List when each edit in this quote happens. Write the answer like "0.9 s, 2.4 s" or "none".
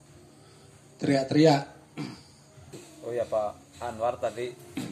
2.9 s